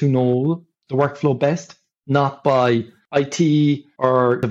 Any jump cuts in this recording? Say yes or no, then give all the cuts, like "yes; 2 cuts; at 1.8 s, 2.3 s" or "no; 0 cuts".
no; 0 cuts